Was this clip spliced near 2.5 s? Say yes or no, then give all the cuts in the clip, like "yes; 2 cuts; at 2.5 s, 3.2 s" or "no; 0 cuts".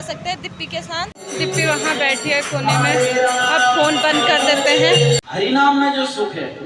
no; 2 cuts; at 1.2 s, 5.5 s